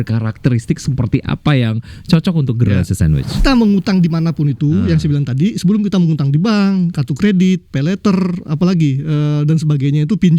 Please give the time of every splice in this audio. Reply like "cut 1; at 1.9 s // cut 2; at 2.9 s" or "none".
cut 1; at 3.4 s